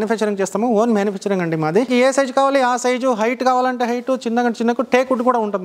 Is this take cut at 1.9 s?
yes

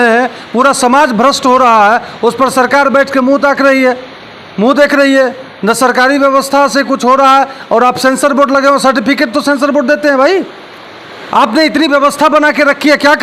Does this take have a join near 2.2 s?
no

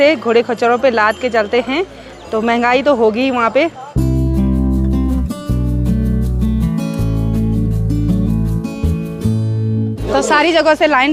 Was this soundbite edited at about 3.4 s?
no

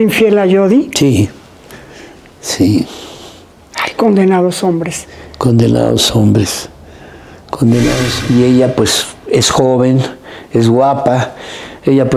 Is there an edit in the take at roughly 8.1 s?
yes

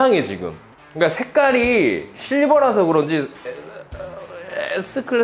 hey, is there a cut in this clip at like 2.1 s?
no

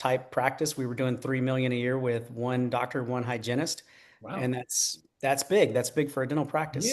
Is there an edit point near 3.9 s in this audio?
no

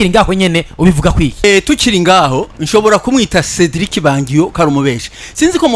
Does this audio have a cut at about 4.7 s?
no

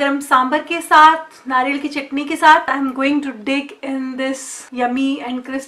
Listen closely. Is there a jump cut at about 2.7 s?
yes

